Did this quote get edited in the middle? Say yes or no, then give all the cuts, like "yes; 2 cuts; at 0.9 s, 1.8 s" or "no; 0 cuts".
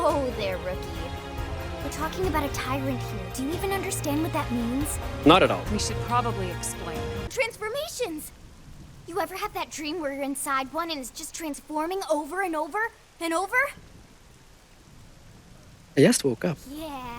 yes; 1 cut; at 7.3 s